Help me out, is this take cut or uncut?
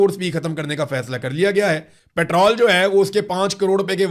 cut